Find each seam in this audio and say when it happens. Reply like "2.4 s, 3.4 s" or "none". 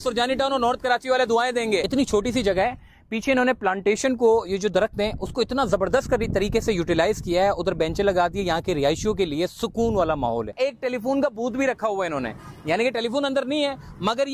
1.9 s, 10.5 s